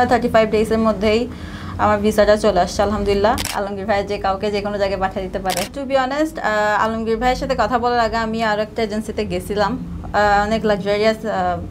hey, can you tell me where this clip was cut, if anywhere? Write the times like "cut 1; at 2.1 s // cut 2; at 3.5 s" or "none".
cut 1; at 3.5 s // cut 2; at 5.7 s

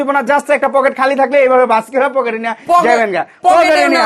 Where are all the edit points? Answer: none

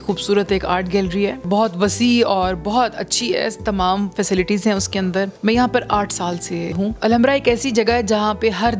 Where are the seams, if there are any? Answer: cut 1; at 1.4 s // cut 2; at 5.3 s // cut 3; at 6.9 s

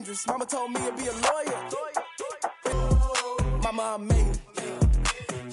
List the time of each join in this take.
cut 1; at 2.7 s

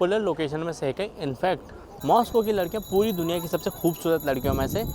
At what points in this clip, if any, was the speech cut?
cut 1; at 1.8 s

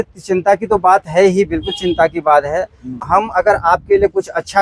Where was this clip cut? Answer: cut 1; at 3.0 s

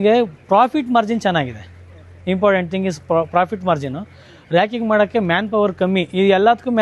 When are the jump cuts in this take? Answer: none

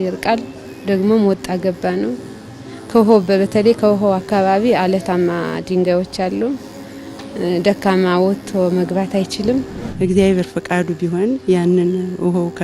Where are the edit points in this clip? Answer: cut 1; at 9.8 s

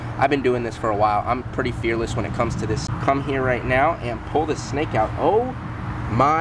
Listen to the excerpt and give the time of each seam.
cut 1; at 2.8 s

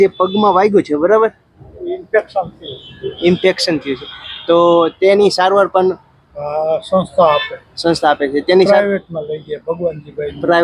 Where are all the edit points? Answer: none

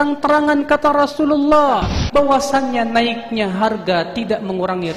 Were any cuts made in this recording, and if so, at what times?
cut 1; at 2.0 s

